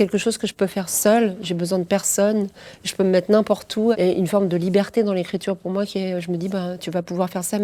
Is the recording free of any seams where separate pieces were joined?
yes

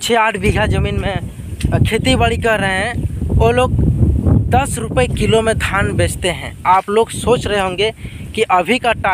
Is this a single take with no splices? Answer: yes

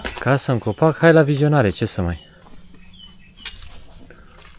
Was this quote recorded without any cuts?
yes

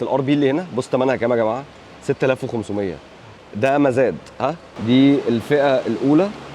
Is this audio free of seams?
no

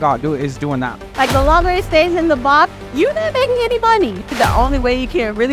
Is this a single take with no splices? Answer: no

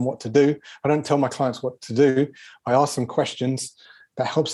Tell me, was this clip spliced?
no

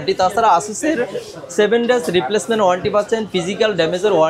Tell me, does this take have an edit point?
no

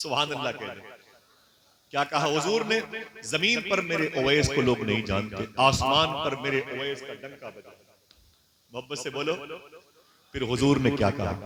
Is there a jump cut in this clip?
no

